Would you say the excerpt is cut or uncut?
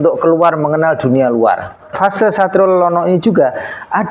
cut